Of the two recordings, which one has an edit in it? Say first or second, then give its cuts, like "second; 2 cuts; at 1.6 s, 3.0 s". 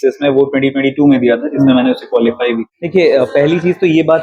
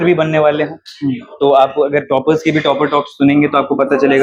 first; 1 cut; at 2.7 s